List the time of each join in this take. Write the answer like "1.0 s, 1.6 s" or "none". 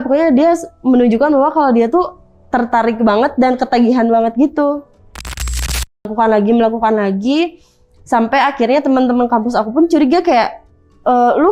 5.5 s